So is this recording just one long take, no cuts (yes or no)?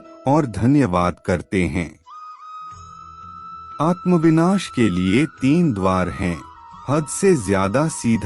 no